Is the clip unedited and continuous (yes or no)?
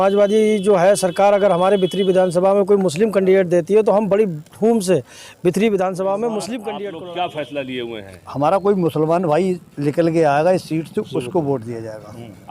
no